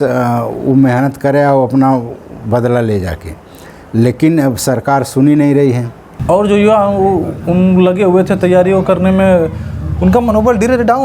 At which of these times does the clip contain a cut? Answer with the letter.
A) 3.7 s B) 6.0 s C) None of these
B